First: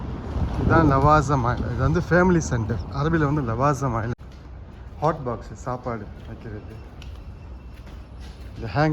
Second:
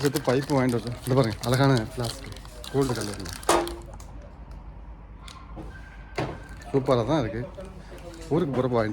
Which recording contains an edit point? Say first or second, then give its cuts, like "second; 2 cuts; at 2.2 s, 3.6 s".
first; 1 cut; at 4.2 s